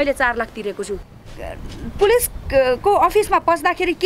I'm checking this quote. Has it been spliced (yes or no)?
yes